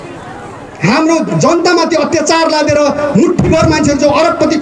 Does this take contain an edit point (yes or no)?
no